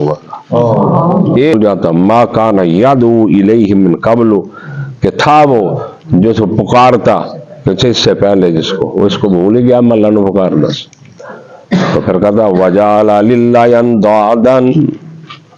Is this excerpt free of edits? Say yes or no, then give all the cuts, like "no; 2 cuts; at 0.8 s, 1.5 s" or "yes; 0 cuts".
no; 1 cut; at 1.5 s